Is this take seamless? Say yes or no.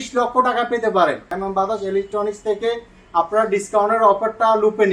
no